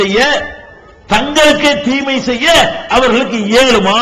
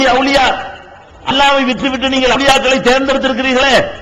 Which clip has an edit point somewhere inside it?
second; 1 cut; at 2.4 s

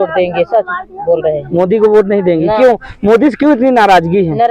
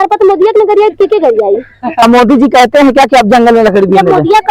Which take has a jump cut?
second; 1 cut; at 2.0 s

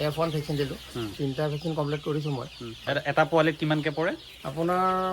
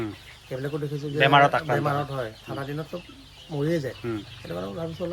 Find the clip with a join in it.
first; 2 cuts; at 1.1 s, 2.8 s

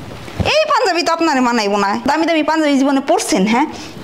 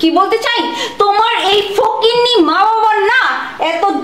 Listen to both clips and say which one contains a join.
first; 1 cut; at 2.1 s

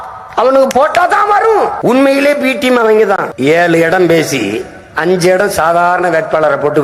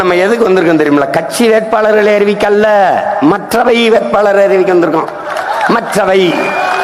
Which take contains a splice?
first; 2 cuts; at 1.8 s, 3.3 s

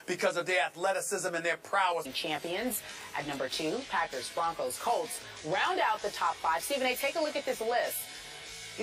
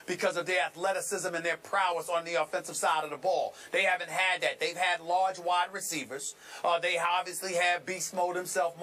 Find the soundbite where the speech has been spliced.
second; 1 cut; at 2.0 s

